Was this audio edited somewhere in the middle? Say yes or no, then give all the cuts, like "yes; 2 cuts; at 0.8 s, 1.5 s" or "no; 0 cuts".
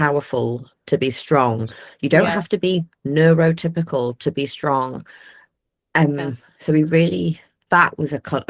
no; 0 cuts